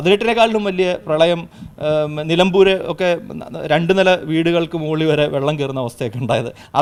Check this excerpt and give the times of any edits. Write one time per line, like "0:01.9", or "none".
none